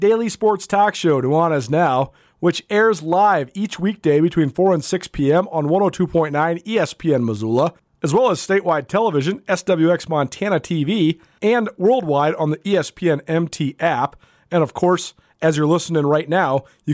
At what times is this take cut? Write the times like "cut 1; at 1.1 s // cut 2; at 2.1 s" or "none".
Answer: cut 1; at 7.9 s // cut 2; at 11.3 s